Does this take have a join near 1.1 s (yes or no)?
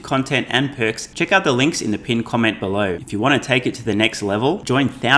yes